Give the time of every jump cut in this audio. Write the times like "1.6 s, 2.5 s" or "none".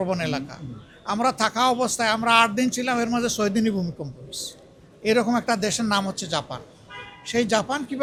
none